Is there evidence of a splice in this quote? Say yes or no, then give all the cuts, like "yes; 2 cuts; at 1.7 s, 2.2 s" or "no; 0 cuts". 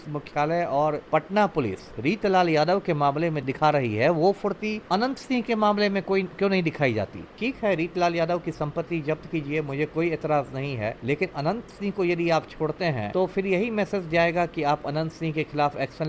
yes; 6 cuts; at 1.0 s, 3.5 s, 4.8 s, 7.2 s, 11.0 s, 13.0 s